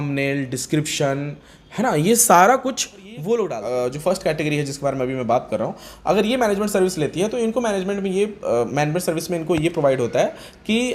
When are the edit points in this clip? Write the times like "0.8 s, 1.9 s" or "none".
3.6 s